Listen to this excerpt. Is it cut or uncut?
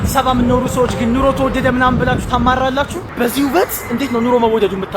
cut